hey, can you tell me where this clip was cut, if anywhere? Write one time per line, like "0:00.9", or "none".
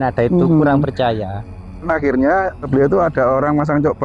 0:01.7
0:02.7